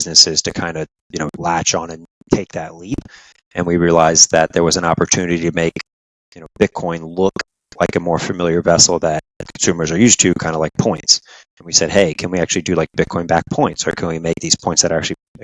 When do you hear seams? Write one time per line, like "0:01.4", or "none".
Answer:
none